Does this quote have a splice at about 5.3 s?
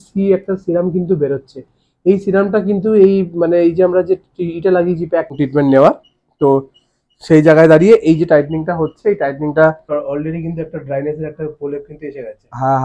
yes; 2 cuts; at 5.3 s, 9.9 s

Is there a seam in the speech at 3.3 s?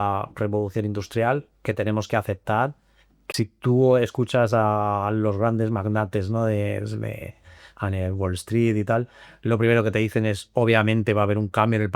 yes; 1 cut; at 3.3 s

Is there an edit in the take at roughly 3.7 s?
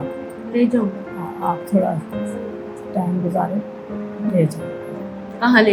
no; 0 cuts

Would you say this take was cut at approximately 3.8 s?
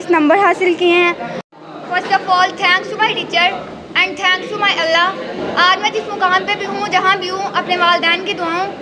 no; 1 cut; at 1.4 s

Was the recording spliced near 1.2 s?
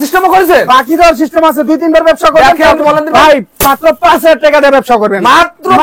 no; 1 cut; at 2.8 s

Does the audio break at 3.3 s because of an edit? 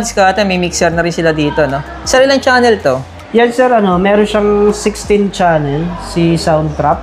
no; 0 cuts

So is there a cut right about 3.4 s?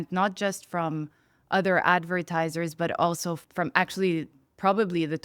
yes; 1 cut; at 3.4 s

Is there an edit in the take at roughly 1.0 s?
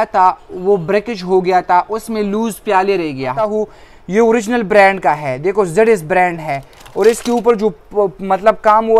no; 1 cut; at 3.5 s

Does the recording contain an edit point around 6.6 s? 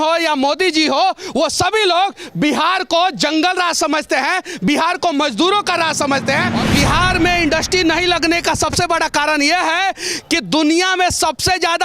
yes; 1 cut; at 6.6 s

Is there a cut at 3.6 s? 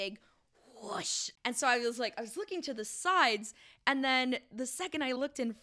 no; 1 cut; at 1.2 s

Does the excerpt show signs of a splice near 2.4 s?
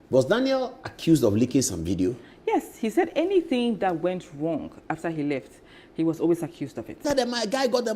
no; 1 cut; at 7.0 s

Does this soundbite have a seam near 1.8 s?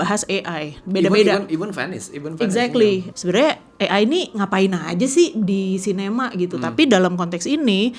no; 1 cut; at 3.1 s

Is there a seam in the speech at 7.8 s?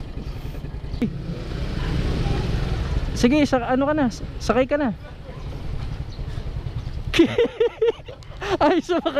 no; 1 cut; at 1.0 s

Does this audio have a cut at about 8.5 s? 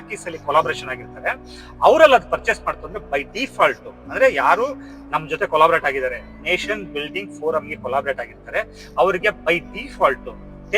no; 0 cuts

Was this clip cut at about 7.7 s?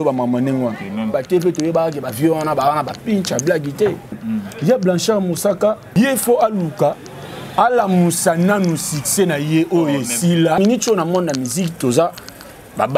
no; 4 cuts; at 1.1 s, 4.2 s, 5.8 s, 10.6 s

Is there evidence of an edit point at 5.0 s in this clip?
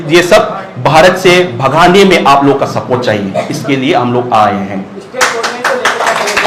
no; 0 cuts

